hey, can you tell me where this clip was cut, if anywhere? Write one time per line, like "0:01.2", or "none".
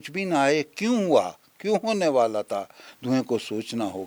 none